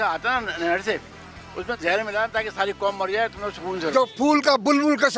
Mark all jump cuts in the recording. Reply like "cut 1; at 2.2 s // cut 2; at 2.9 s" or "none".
cut 1; at 3.9 s